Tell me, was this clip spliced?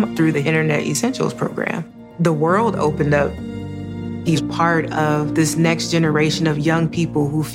no; 0 cuts

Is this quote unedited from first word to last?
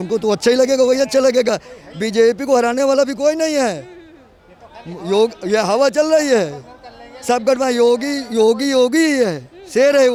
yes; 0 cuts

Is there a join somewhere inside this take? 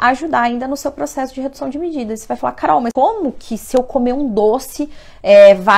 yes; 1 cut; at 2.9 s

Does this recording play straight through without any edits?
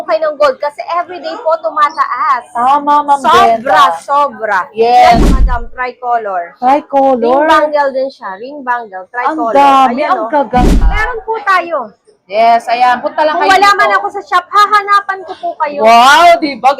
no; 2 cuts; at 5.4 s, 10.8 s

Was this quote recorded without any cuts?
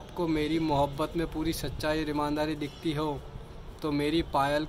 yes; 0 cuts

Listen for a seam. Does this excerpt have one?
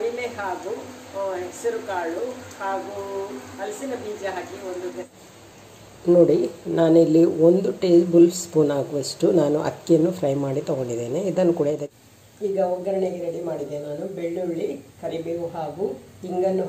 yes; 2 cuts; at 5.0 s, 11.9 s

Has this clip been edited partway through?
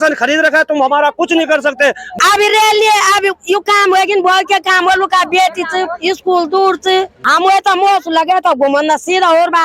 yes; 2 cuts; at 2.1 s, 7.2 s

